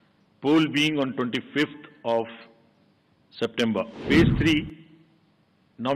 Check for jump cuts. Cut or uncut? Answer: cut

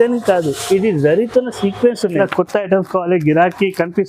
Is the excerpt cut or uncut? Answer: cut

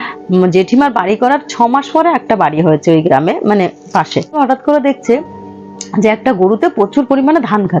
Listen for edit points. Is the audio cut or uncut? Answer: cut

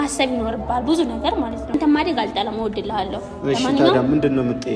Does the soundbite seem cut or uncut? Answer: cut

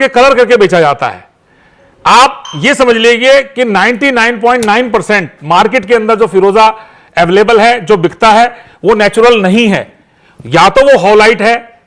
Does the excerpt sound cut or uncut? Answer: uncut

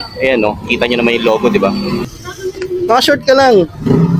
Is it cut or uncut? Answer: cut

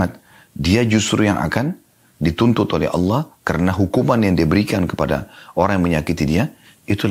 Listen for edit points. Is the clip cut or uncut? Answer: uncut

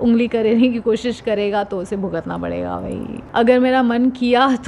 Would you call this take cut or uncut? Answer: cut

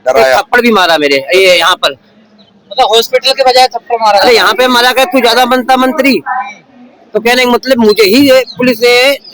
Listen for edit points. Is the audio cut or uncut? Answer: uncut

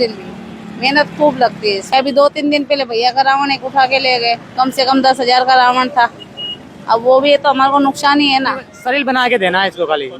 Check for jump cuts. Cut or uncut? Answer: cut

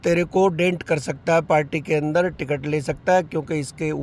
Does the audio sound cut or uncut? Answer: uncut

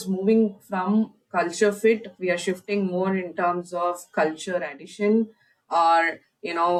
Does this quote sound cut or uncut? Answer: uncut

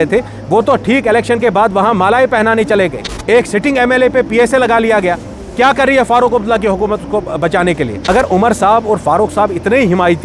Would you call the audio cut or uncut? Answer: cut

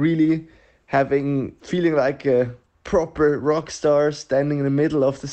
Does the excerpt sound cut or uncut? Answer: cut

